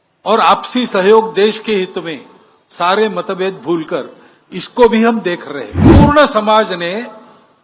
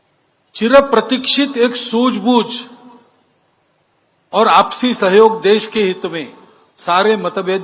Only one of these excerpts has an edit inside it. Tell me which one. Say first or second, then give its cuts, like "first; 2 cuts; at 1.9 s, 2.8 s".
first; 1 cut; at 5.9 s